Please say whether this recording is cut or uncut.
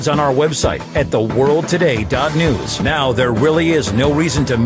cut